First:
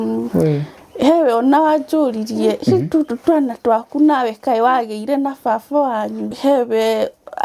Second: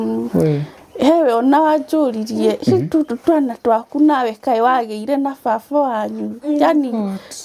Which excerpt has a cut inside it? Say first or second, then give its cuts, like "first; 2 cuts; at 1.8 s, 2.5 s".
first; 1 cut; at 6.3 s